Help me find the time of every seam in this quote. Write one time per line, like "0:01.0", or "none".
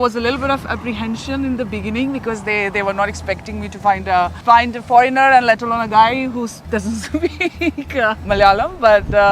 0:04.4
0:08.3